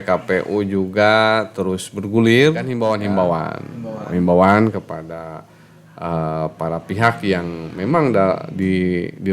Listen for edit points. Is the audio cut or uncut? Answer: cut